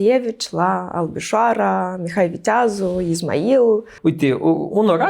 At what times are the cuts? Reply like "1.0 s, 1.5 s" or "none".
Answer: 3.9 s